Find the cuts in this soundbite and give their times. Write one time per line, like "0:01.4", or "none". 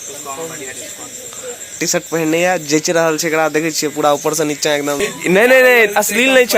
0:01.6
0:05.0

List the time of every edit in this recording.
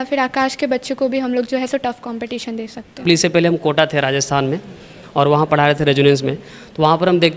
0:03.0

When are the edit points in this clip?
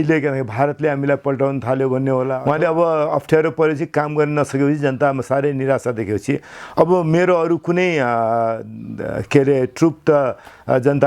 0:02.4

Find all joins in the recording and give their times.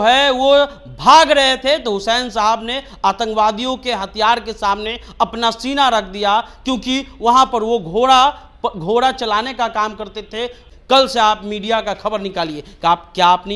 0:10.6

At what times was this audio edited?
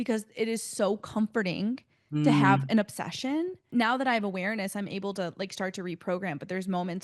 0:03.7

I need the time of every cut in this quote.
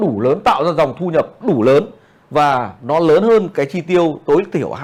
none

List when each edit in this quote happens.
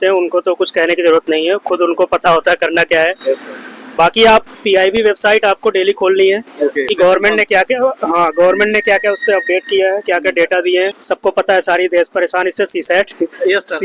0:04.5
0:11.0

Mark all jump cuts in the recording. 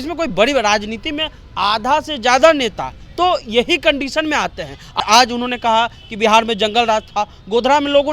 0:05.0

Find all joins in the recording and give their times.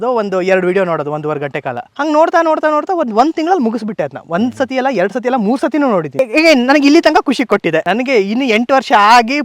0:01.9
0:06.1
0:07.8

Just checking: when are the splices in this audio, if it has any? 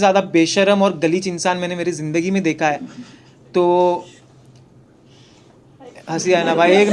none

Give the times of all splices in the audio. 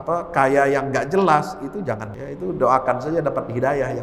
0:02.1

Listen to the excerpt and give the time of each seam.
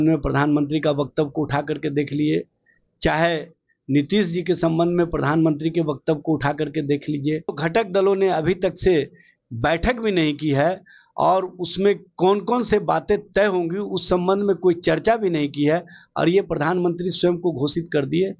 0:07.6

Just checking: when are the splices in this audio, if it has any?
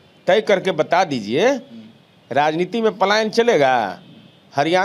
none

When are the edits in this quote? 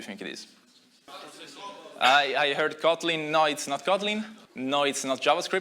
0:01.1
0:04.4

